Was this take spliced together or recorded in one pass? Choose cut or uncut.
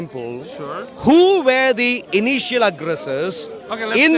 uncut